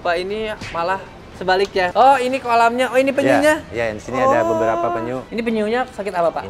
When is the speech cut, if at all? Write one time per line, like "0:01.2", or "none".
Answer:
0:01.9
0:05.2